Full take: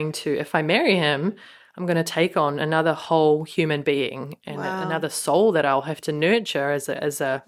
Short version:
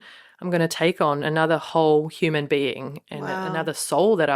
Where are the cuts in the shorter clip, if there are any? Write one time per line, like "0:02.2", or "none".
none